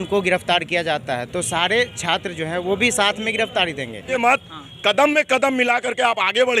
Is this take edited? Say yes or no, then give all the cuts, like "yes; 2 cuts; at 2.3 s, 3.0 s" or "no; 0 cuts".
yes; 1 cut; at 4.1 s